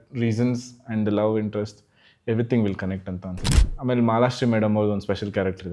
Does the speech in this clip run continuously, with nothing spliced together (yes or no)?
yes